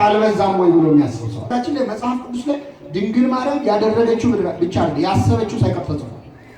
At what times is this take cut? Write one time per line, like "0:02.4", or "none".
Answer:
0:01.5